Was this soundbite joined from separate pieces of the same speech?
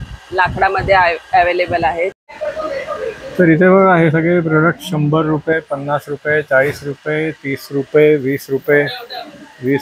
yes; 1 cut; at 2.2 s

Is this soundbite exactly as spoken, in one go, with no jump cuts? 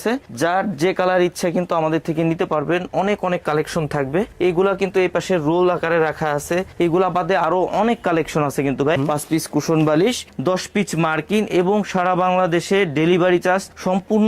no; 1 cut; at 9.0 s

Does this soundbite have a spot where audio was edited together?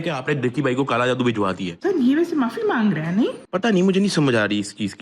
yes; 1 cut; at 1.7 s

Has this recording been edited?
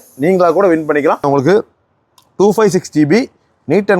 yes; 1 cut; at 1.2 s

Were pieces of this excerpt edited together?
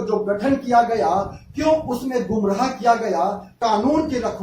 yes; 1 cut; at 3.5 s

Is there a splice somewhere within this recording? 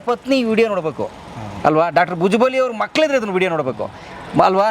no; 0 cuts

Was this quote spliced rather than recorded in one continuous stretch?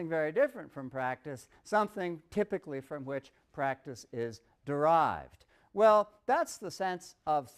yes; 1 cut; at 2.8 s

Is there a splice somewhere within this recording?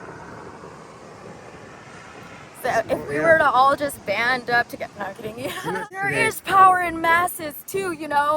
yes; 1 cut; at 5.7 s

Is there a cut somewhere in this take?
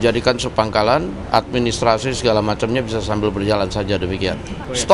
no; 0 cuts

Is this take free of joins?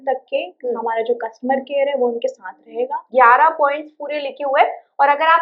no; 1 cut; at 3.1 s

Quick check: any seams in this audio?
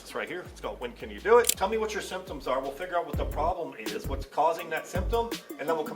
yes; 1 cut; at 1.5 s

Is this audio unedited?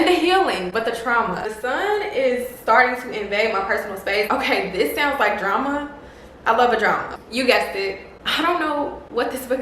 no; 3 cuts; at 1.4 s, 4.3 s, 7.1 s

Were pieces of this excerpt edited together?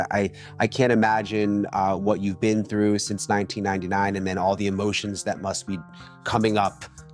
no; 0 cuts

